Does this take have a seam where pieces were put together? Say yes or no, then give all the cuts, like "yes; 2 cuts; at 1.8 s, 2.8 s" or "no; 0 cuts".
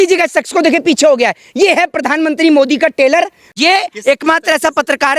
yes; 1 cut; at 3.5 s